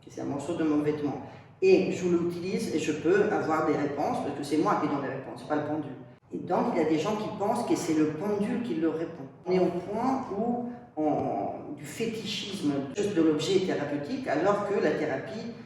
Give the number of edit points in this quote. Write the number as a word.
two